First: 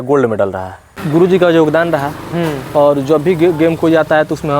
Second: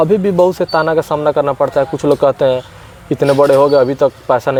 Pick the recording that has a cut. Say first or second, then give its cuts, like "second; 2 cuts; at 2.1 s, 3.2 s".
first; 1 cut; at 0.9 s